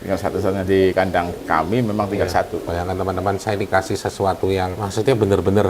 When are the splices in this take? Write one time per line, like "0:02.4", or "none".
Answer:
0:02.7
0:04.8